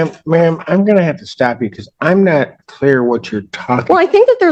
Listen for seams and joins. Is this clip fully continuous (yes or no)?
yes